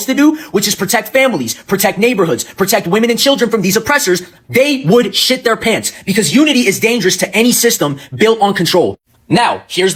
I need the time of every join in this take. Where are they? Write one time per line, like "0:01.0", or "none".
none

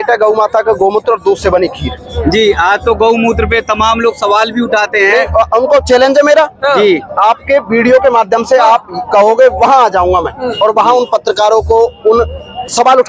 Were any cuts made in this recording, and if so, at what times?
none

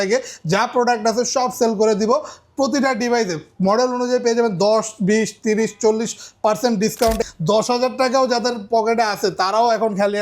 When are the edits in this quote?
0:07.2

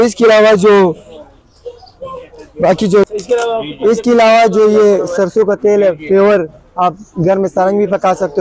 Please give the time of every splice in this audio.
0:03.1

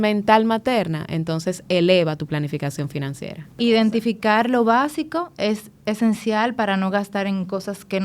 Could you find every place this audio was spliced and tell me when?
0:03.5

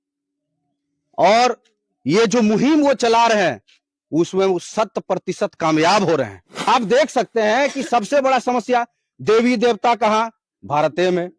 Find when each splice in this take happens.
0:06.5

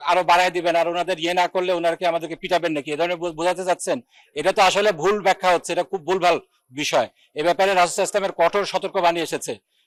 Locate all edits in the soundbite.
none

